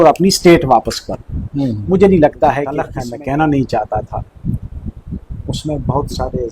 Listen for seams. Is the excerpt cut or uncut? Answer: cut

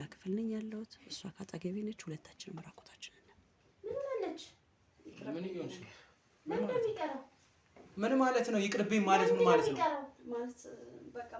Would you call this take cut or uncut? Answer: cut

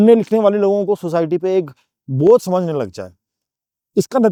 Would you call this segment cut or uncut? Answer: uncut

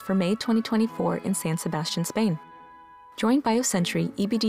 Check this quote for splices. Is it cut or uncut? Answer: uncut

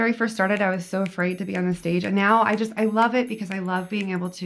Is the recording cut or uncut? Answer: uncut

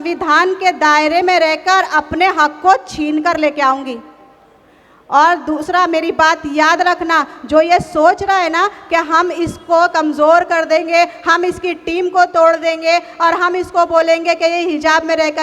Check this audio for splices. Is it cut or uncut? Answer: uncut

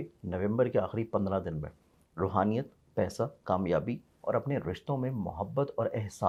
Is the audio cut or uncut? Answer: uncut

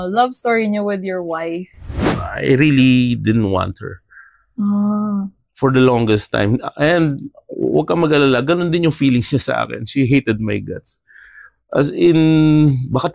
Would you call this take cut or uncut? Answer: cut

